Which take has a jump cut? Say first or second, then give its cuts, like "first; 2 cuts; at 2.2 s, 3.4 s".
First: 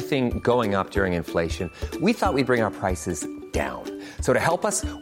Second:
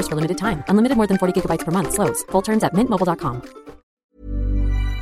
second; 1 cut; at 3.8 s